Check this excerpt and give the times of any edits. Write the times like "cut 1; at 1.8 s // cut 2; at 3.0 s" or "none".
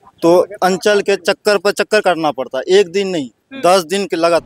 none